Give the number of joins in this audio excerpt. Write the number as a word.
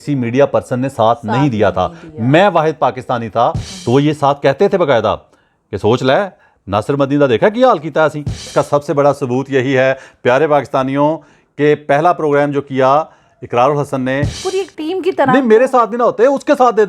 three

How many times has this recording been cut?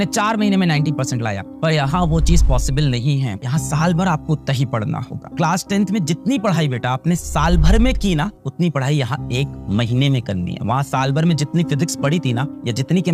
two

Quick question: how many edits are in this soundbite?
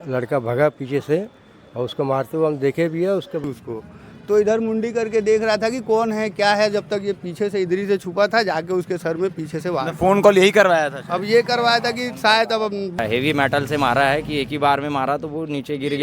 two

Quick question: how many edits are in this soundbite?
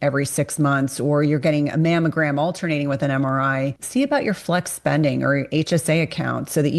one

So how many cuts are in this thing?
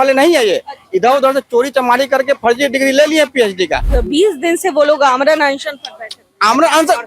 one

